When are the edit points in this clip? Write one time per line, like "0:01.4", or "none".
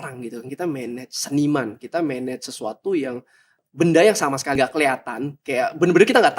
0:03.6
0:04.6

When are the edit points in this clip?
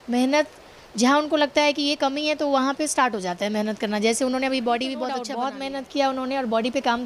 0:05.2

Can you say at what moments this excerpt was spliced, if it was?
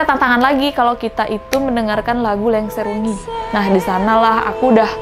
none

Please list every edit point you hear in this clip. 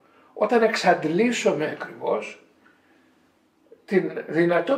none

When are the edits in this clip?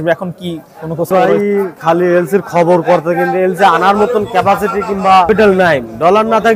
0:01.1
0:05.3

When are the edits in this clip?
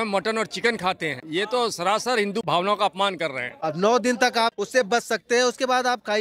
0:02.4
0:03.6
0:04.5

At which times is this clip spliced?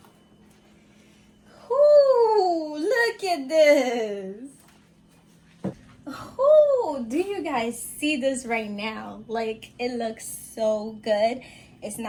none

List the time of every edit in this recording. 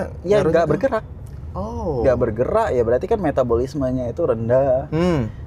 none

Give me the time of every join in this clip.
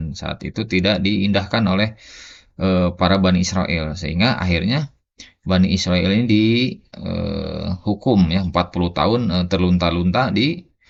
none

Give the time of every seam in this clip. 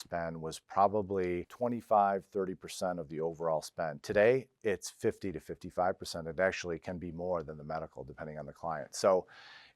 0:01.5

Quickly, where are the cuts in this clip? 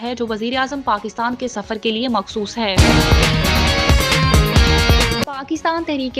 0:02.7
0:05.3

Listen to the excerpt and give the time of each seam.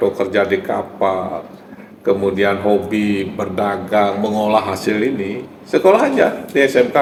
none

